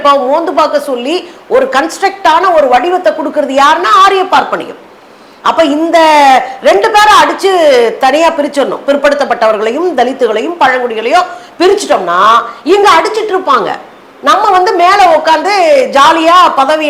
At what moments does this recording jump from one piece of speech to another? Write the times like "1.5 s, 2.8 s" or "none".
none

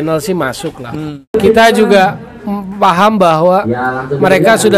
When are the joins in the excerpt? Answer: 1.4 s

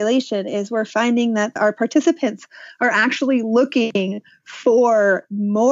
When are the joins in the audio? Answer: 1.6 s

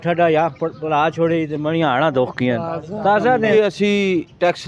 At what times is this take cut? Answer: 3.5 s

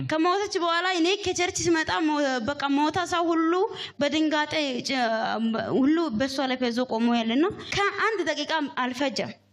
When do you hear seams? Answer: 7.7 s

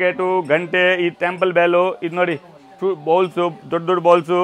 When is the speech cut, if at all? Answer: none

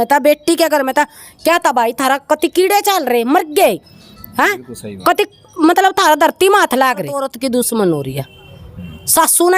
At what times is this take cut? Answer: 7.3 s

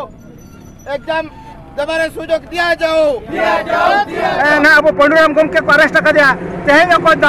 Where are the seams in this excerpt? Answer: 4.4 s

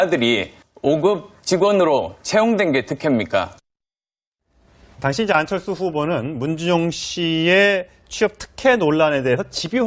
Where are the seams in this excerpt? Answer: 1.8 s

